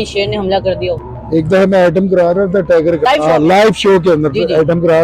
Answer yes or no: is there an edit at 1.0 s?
yes